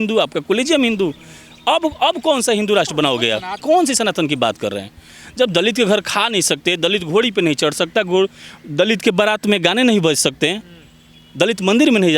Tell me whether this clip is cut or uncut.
cut